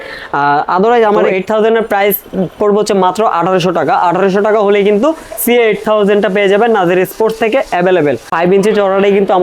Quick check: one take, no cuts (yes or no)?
no